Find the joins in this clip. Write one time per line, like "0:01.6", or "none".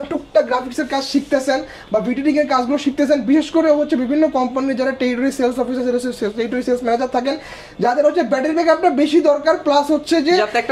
none